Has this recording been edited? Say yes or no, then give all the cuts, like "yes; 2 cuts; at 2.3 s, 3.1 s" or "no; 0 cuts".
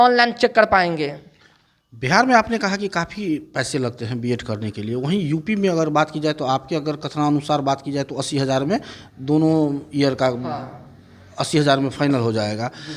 no; 0 cuts